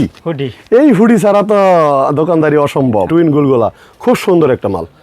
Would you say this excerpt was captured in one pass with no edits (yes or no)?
no